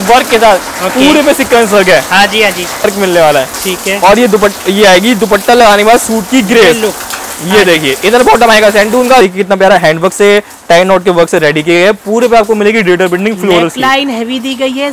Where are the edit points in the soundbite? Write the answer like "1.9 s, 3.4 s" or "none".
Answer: 2.9 s, 9.2 s